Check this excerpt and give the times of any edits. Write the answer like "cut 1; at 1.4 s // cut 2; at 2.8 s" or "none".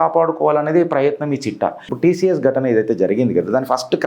cut 1; at 1.8 s